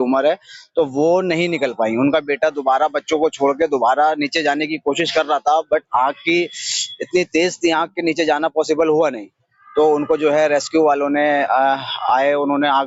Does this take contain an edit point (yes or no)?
no